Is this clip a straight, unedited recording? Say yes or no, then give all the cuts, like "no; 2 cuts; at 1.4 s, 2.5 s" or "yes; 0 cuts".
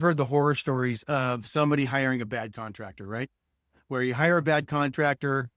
yes; 0 cuts